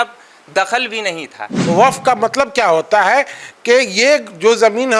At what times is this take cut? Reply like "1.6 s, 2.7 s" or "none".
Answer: 1.5 s